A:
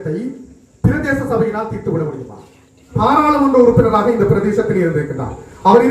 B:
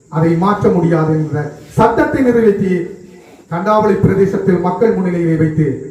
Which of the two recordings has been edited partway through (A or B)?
A